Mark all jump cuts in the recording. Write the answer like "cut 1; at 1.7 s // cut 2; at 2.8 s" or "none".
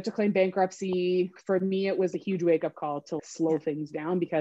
cut 1; at 1.4 s // cut 2; at 3.2 s